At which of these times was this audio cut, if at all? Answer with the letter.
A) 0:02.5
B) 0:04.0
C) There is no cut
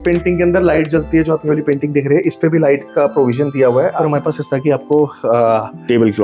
B